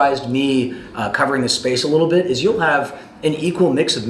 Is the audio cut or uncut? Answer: uncut